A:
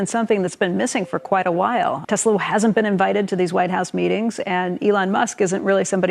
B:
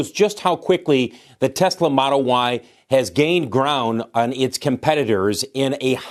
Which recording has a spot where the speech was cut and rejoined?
A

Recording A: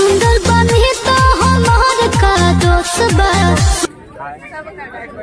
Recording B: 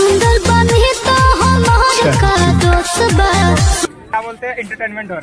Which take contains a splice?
B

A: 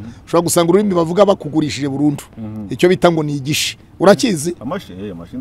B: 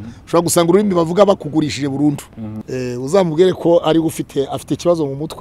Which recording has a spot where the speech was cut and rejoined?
B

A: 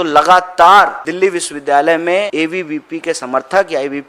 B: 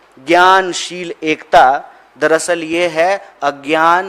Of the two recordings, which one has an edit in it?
A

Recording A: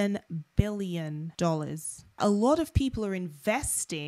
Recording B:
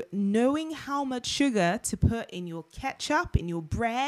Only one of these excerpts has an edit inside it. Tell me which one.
A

